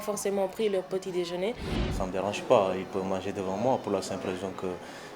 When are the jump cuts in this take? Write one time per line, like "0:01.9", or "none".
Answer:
0:01.9